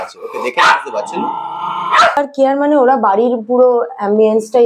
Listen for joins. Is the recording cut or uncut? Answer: cut